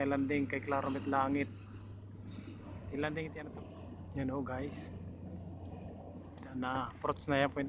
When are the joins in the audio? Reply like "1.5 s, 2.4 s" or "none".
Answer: 3.4 s